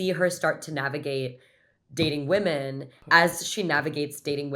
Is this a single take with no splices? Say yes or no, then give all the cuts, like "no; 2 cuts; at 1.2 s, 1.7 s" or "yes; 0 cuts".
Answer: no; 1 cut; at 3.0 s